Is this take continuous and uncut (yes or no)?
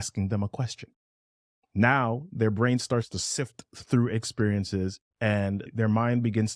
yes